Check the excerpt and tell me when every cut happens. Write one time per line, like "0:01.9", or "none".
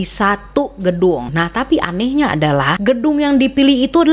0:01.3
0:02.7